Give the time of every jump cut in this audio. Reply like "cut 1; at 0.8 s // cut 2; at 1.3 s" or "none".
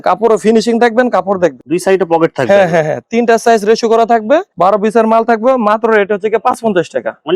none

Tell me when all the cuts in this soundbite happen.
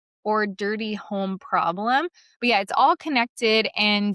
cut 1; at 2.3 s

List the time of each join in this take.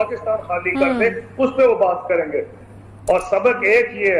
cut 1; at 2.6 s

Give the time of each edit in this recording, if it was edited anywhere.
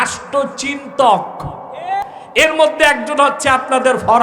cut 1; at 2.0 s

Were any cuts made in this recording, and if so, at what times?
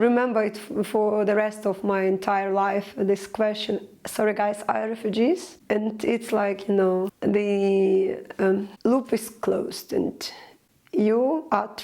cut 1; at 5.5 s // cut 2; at 7.1 s // cut 3; at 8.7 s

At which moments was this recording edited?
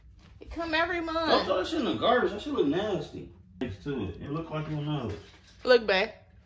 cut 1; at 3.6 s

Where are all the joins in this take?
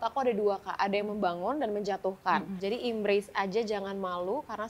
cut 1; at 2.5 s

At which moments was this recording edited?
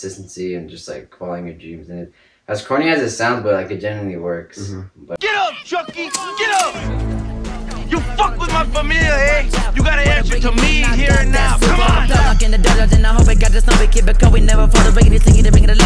cut 1; at 5.2 s

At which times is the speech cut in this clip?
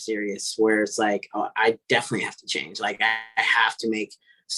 none

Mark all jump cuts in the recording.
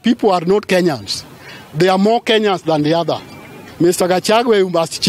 cut 1; at 3.6 s

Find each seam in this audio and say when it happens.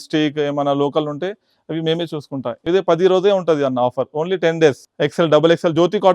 cut 1; at 2.6 s // cut 2; at 4.9 s

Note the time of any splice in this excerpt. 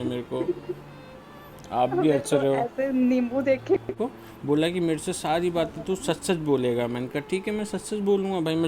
cut 1; at 3.9 s

